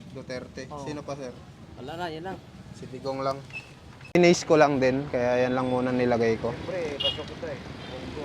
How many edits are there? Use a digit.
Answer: 1